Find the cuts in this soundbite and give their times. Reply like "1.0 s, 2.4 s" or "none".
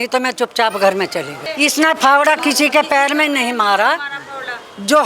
1.4 s